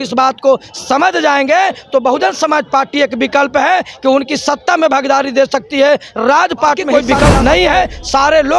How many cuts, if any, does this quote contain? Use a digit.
1